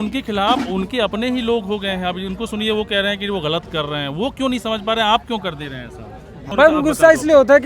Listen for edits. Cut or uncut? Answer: cut